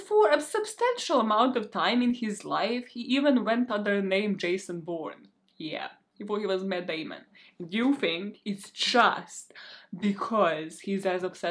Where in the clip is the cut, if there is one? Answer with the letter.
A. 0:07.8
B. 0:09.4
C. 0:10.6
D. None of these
D